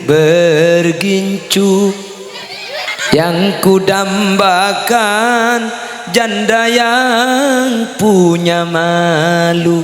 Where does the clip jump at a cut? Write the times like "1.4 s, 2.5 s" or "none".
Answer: 2.9 s